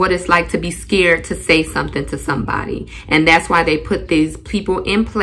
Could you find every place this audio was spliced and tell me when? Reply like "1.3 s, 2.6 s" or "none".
none